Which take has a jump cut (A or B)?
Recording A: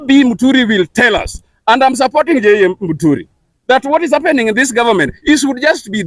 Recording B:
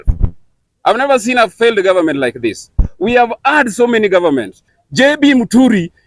B